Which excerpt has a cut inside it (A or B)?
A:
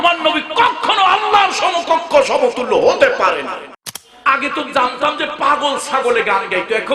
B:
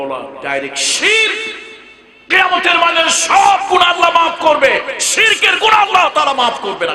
A